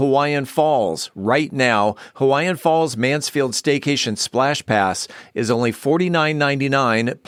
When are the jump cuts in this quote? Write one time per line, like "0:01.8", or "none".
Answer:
none